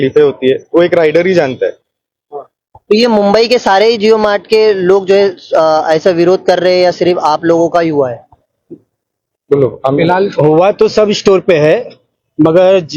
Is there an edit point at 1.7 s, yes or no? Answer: no